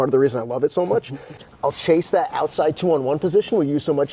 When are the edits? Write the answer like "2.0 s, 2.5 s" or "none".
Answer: 1.4 s